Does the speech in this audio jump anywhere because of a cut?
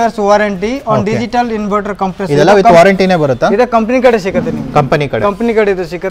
no; 0 cuts

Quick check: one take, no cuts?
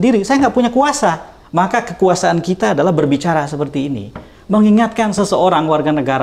no; 1 cut; at 1.3 s

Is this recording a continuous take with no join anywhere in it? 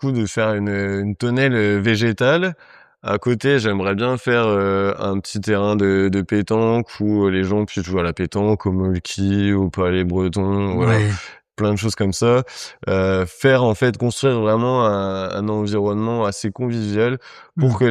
yes; 0 cuts

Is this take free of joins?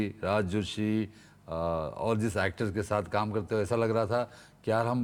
yes; 0 cuts

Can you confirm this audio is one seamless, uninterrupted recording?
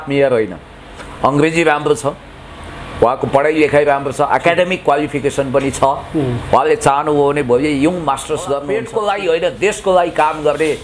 no; 1 cut; at 8.7 s

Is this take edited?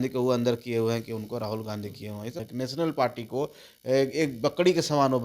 yes; 1 cut; at 2.5 s

